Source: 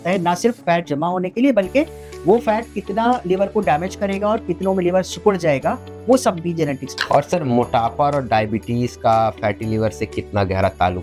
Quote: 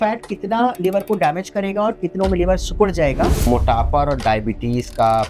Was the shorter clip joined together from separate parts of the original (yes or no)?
yes